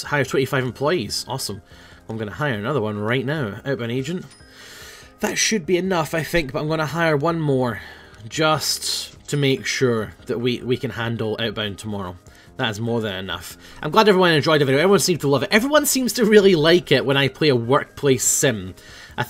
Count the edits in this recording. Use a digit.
0